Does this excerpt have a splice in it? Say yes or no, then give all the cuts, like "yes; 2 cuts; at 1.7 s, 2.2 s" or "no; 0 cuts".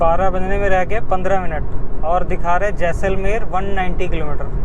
no; 0 cuts